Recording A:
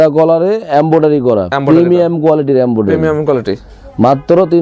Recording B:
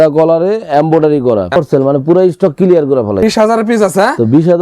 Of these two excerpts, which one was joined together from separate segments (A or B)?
B